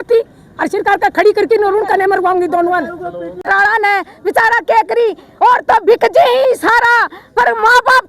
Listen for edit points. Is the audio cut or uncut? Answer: cut